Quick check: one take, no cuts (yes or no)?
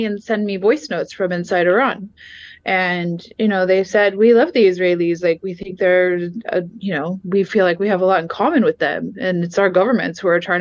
yes